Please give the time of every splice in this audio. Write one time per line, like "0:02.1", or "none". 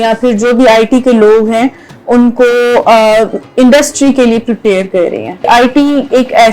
0:05.5